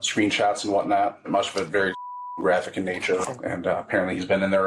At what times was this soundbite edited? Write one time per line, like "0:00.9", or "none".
0:01.3
0:03.3